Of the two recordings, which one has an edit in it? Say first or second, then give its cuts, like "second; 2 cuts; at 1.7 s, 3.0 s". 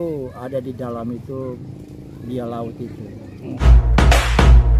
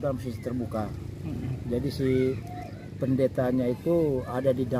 first; 1 cut; at 3.8 s